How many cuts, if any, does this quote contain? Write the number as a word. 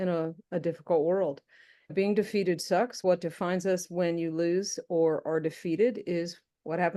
two